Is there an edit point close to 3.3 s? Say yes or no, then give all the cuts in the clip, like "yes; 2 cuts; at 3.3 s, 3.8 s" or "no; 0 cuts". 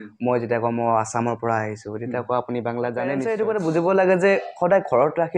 yes; 1 cut; at 3.3 s